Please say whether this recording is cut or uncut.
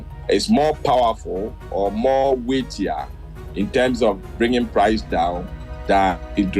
uncut